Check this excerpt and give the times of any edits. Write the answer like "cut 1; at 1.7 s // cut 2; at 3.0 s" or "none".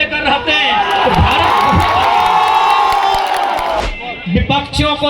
cut 1; at 3.8 s